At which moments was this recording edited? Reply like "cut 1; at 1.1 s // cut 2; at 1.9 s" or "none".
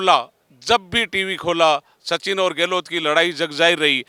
none

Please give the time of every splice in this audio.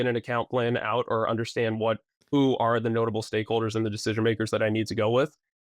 none

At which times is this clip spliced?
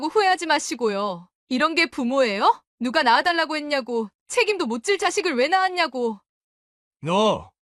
cut 1; at 2.7 s // cut 2; at 6.2 s

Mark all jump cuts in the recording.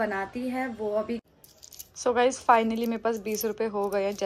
cut 1; at 1.2 s

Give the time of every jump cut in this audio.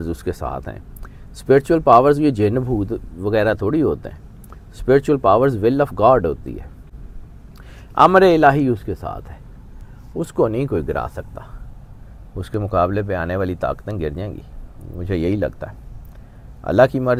none

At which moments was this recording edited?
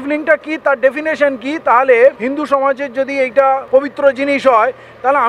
cut 1; at 2.2 s // cut 2; at 3.6 s

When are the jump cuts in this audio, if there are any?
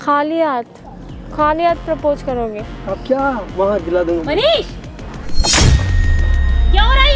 none

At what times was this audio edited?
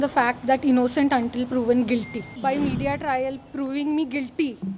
cut 1; at 2.3 s

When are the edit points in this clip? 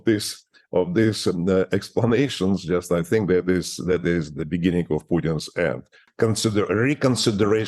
cut 1; at 6.0 s

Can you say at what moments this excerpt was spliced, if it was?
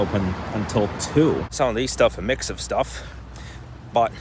cut 1; at 1.5 s

